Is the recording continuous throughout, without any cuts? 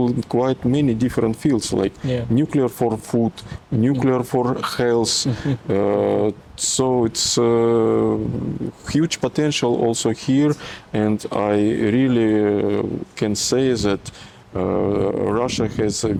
yes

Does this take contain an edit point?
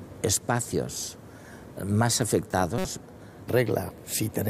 no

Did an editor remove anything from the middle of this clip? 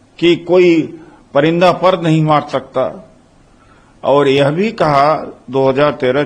no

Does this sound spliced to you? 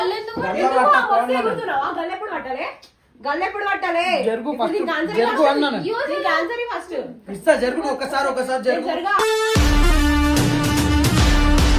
no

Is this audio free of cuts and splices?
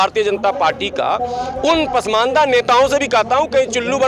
yes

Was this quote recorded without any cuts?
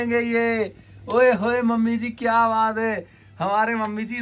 yes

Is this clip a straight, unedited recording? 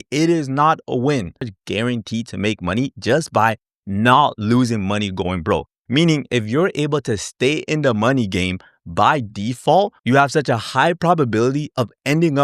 no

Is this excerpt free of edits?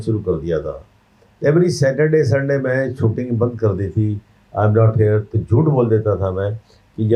yes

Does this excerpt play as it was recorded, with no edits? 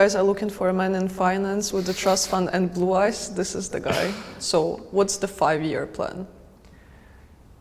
yes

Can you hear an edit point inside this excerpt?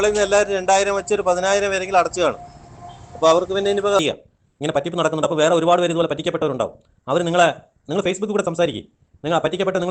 yes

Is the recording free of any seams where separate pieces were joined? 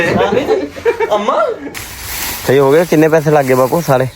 no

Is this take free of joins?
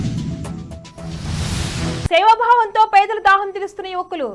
yes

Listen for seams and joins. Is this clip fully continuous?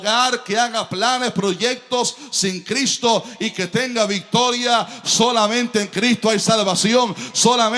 yes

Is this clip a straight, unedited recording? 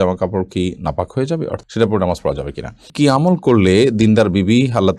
no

